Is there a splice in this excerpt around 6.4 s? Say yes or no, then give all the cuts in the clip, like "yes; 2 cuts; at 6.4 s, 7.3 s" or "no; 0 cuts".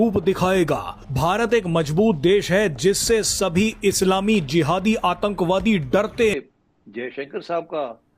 yes; 1 cut; at 6.4 s